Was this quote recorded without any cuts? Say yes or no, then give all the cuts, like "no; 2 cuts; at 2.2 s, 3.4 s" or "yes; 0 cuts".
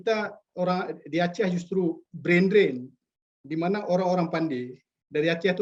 yes; 0 cuts